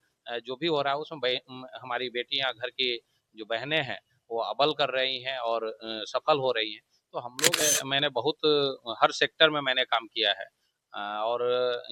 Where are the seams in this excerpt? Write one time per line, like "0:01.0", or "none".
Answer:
0:07.6